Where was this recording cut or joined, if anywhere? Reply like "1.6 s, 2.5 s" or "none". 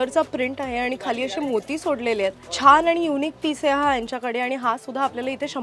2.5 s